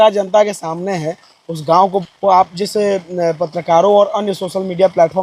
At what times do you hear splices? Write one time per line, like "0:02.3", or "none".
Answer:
0:02.0